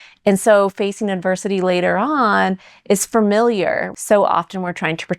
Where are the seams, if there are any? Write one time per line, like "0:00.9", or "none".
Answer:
0:03.9